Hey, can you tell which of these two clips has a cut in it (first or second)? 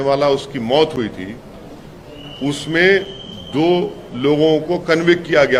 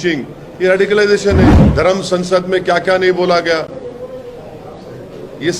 second